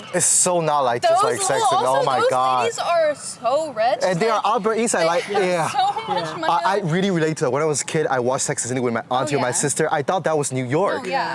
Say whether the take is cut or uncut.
uncut